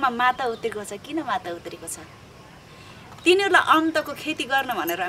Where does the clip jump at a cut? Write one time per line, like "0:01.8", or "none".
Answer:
none